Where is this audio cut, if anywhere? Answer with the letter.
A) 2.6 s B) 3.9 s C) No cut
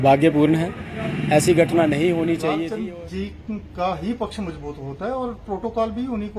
A